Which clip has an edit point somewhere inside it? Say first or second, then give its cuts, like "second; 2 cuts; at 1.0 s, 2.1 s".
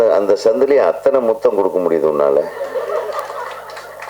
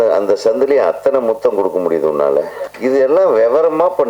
second; 1 cut; at 2.6 s